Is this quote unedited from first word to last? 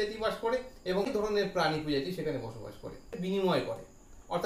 no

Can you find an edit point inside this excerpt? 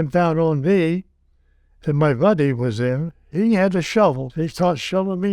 yes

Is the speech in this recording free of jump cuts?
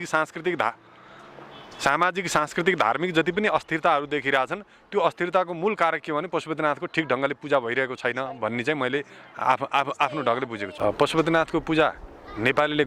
no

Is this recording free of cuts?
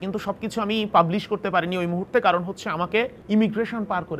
no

